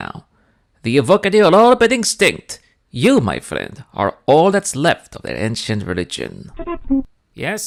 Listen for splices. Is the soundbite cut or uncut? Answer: uncut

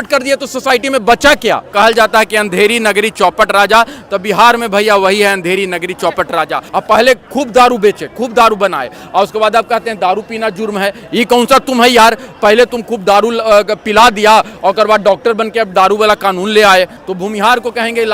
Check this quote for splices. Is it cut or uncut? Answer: cut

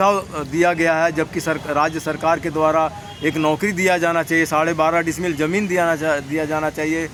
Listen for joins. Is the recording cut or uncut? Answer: uncut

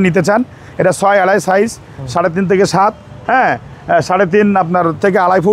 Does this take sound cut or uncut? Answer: uncut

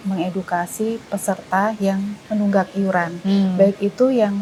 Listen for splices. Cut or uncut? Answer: uncut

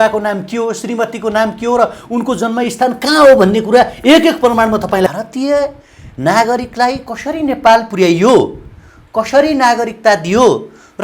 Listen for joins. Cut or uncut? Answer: cut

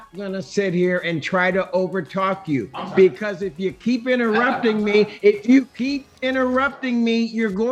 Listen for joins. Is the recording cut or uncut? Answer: uncut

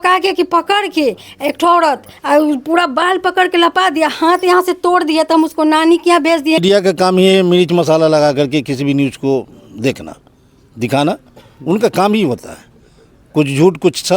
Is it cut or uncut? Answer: cut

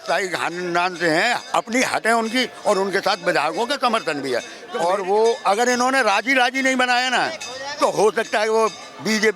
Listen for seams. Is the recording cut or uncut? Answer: cut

